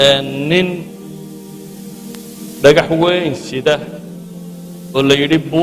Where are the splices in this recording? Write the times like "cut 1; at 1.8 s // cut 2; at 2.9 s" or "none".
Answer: cut 1; at 1.2 s // cut 2; at 2.6 s